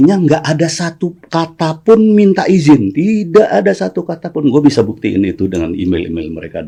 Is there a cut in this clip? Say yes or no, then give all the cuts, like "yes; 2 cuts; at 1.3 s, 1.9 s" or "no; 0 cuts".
no; 0 cuts